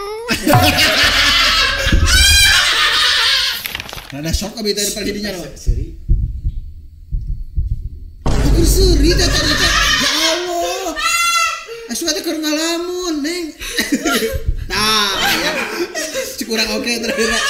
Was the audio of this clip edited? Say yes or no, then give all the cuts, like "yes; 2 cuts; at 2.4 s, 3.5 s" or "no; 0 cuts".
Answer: yes; 1 cut; at 3.5 s